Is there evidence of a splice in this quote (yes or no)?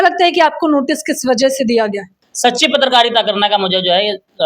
yes